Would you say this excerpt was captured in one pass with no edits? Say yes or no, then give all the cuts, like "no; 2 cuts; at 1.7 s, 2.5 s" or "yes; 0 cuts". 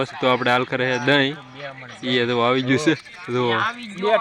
yes; 0 cuts